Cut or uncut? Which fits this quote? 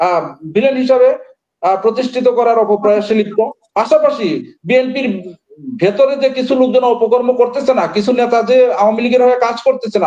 uncut